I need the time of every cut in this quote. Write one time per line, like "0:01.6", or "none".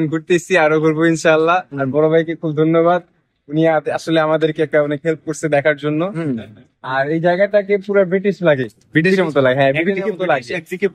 none